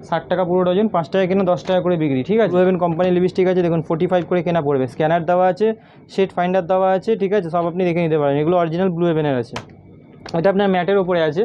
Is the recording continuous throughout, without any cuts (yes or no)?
yes